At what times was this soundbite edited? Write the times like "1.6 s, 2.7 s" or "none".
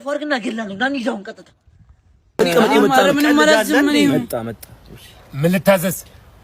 2.3 s